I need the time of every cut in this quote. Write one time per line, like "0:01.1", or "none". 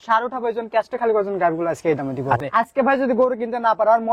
0:02.4

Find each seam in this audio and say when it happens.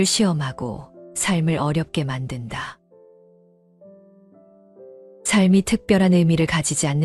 0:03.4
0:05.0

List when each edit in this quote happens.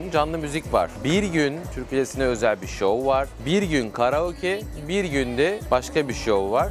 0:00.9
0:01.7
0:05.6

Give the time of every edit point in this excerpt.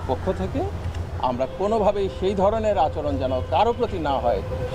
none

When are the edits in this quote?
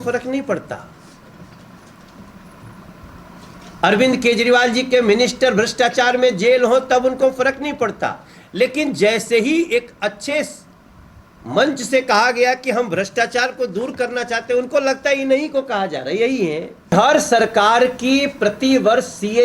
0:16.9

